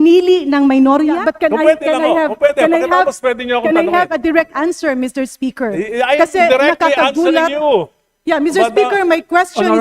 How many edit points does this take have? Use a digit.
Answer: 1